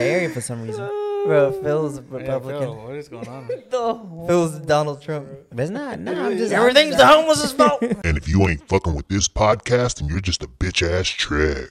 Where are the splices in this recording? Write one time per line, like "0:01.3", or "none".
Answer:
0:08.0